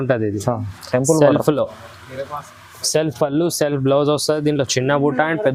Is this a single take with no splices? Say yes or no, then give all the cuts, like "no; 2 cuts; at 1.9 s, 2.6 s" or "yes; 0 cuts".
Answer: yes; 0 cuts